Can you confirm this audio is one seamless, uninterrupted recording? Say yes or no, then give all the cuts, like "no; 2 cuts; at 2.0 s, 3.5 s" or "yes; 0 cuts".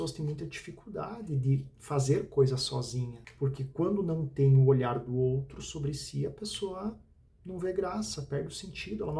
yes; 0 cuts